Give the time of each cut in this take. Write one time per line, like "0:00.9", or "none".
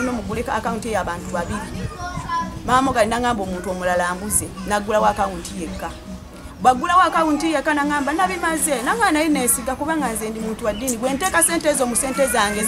none